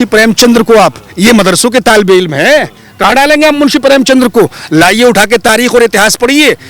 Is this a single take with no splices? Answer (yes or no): yes